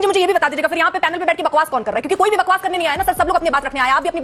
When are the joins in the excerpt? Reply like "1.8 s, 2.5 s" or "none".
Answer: none